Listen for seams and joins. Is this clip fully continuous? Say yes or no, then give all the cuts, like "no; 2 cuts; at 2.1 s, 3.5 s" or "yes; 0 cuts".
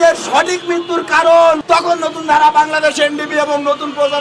no; 1 cut; at 1.6 s